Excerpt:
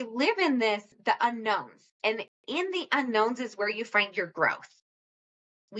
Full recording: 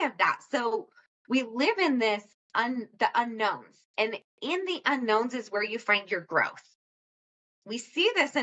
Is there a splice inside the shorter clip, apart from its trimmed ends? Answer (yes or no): yes